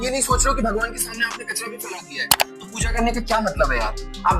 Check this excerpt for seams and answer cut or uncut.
uncut